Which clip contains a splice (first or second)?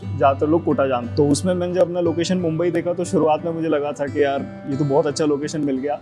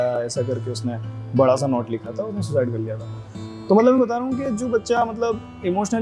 first